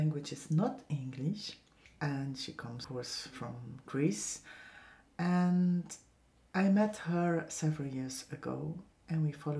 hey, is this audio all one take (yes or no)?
yes